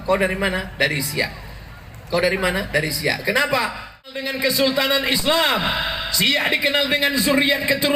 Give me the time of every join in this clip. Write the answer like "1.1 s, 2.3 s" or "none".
4.2 s